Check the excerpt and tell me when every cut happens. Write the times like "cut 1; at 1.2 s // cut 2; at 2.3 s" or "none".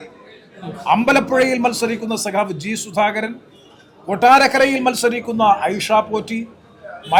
none